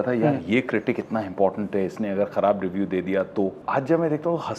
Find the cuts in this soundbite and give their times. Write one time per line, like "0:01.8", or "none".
0:03.6

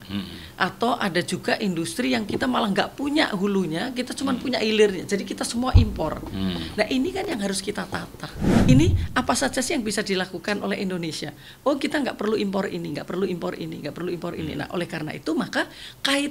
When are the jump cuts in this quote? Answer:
0:08.6

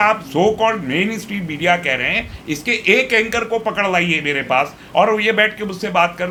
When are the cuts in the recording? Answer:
none

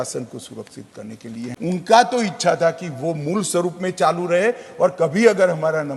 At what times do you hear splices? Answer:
0:01.5

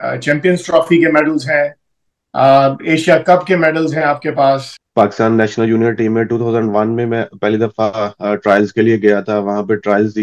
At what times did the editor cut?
0:04.8

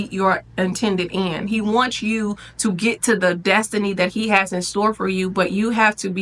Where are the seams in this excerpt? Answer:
none

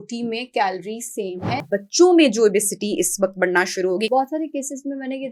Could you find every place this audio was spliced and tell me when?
0:01.6
0:04.1

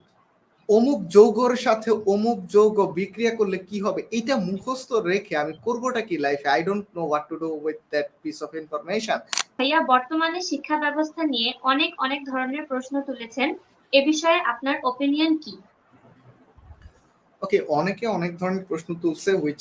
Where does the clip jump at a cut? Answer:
0:09.5

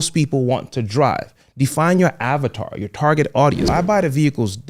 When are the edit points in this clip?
0:03.7

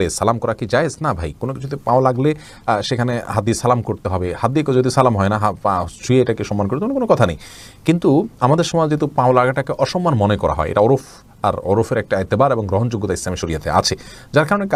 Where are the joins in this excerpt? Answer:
none

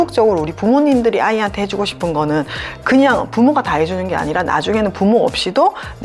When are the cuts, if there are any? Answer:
none

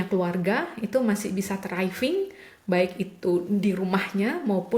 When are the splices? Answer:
none

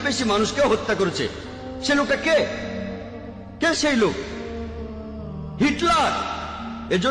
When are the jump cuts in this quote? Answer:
none

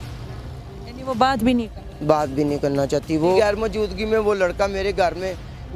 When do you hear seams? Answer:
0:03.4

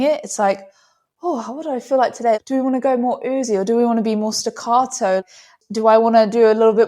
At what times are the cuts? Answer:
0:02.4
0:05.2

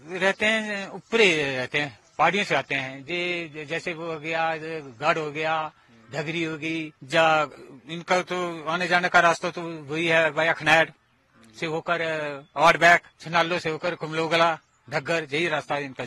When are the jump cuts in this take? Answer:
0:07.0
0:13.2

